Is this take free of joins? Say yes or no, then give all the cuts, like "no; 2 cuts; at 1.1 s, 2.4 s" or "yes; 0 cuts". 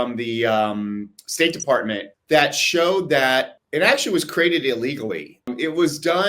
no; 3 cuts; at 2.1 s, 3.6 s, 5.5 s